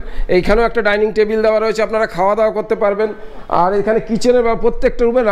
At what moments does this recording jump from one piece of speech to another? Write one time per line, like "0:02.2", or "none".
none